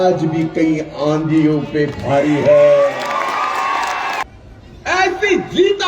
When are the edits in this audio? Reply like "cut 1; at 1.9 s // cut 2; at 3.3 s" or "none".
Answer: cut 1; at 4.2 s